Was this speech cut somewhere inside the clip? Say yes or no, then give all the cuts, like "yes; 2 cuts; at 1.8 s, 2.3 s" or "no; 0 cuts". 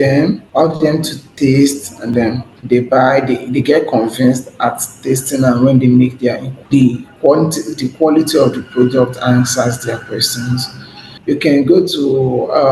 yes; 3 cuts; at 1.0 s, 2.2 s, 6.5 s